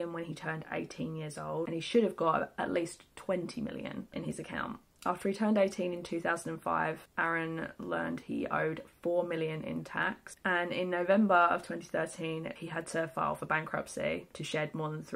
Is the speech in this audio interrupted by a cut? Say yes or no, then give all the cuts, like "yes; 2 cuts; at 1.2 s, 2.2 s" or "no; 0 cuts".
no; 0 cuts